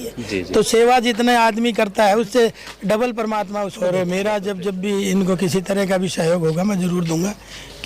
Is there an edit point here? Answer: yes; 1 cut; at 3.7 s

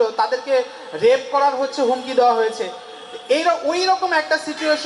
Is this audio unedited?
yes; 0 cuts

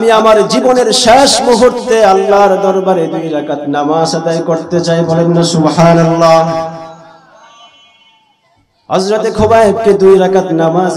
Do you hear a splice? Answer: no; 0 cuts

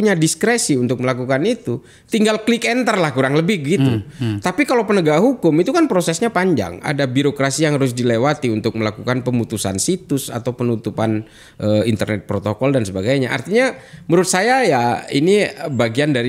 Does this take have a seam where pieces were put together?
no; 0 cuts

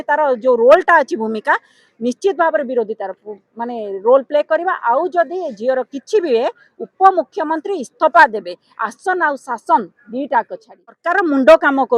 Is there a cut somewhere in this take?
yes; 1 cut; at 11.0 s

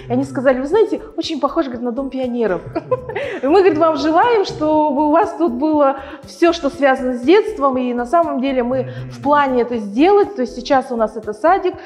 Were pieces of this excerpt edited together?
no; 0 cuts

